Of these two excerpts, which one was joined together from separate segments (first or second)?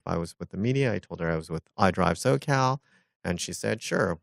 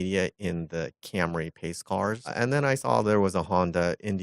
second